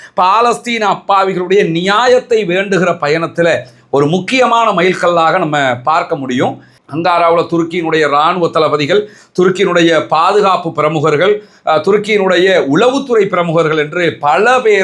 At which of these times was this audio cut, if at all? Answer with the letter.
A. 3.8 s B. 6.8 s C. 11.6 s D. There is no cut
B